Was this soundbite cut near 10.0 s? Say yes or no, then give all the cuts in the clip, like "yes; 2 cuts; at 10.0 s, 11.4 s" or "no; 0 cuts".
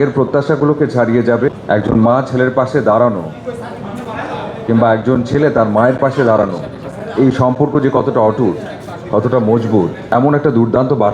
yes; 2 cuts; at 1.5 s, 10.0 s